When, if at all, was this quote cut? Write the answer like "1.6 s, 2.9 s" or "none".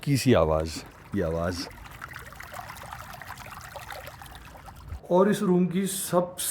2.8 s, 4.9 s